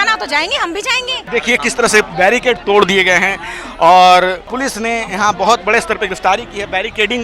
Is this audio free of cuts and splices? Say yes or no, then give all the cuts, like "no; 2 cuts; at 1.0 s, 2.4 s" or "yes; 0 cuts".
no; 2 cuts; at 1.3 s, 4.5 s